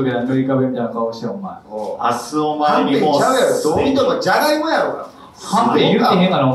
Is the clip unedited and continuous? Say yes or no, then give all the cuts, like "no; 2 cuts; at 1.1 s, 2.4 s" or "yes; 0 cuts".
yes; 0 cuts